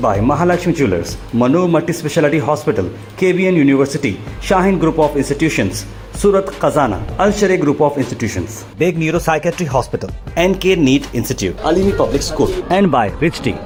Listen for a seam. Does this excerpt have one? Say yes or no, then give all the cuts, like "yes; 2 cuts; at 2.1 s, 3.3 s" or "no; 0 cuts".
no; 0 cuts